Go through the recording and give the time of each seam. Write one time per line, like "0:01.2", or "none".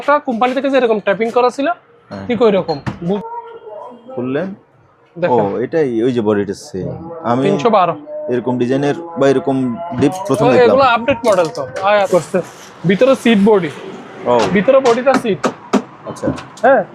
0:03.2
0:12.0